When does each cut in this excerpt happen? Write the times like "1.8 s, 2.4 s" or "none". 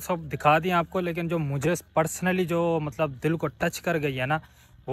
none